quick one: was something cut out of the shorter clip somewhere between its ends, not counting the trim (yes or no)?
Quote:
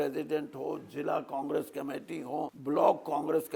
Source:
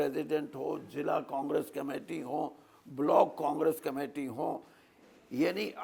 yes